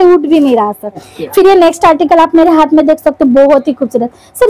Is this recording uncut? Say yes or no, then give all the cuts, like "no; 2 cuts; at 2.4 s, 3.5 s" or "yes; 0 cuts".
no; 1 cut; at 1.0 s